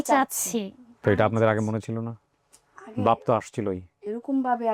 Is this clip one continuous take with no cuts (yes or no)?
yes